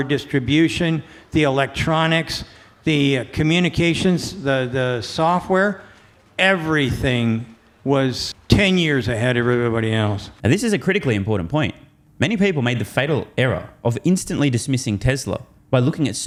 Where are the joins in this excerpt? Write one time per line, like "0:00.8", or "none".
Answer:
none